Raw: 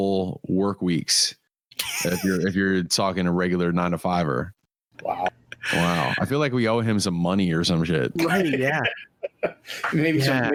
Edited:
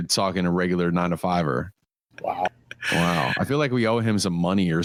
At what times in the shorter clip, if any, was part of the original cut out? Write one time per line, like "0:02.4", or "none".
none